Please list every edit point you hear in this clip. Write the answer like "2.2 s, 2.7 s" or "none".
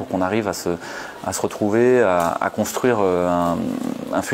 none